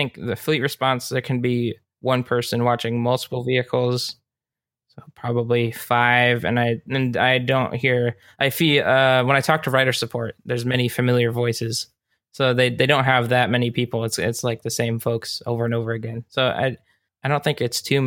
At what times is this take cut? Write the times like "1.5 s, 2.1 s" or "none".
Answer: 17.1 s

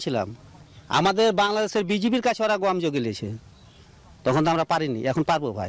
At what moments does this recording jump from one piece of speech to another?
none

